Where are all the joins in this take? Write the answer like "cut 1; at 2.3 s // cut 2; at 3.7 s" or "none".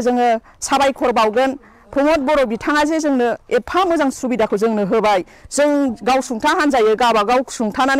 none